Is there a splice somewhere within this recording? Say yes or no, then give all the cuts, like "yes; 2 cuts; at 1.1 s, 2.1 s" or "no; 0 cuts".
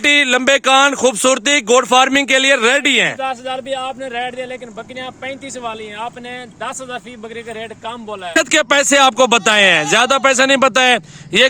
yes; 1 cut; at 8.4 s